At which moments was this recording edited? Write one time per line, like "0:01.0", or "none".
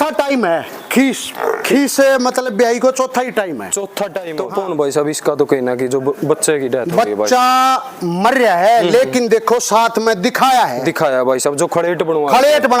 0:04.2

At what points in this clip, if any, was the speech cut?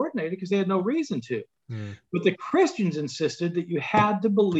none

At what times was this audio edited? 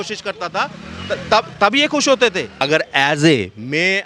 0:02.5

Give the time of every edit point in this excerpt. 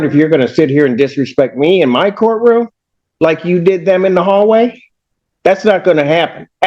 none

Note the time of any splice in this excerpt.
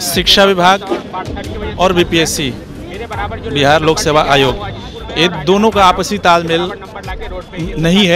none

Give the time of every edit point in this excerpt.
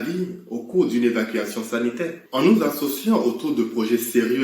0:02.2

